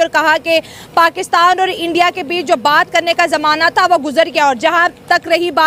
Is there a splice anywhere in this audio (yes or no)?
no